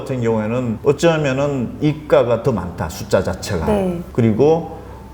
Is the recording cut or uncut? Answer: cut